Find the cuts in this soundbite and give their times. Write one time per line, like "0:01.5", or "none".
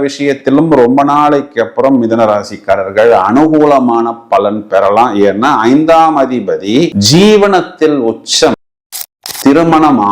0:08.7